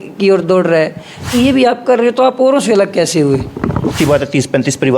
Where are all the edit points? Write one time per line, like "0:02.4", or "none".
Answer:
0:01.3
0:03.9

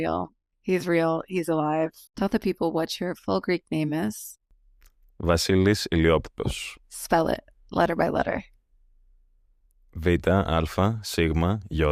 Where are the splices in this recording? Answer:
none

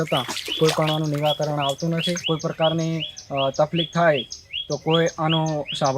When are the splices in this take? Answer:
0:02.2

